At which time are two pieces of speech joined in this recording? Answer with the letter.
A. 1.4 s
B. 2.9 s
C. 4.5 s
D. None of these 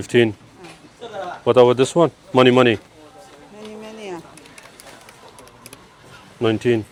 D